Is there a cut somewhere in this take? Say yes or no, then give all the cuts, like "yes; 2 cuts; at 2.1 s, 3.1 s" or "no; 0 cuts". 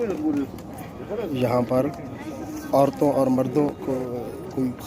no; 0 cuts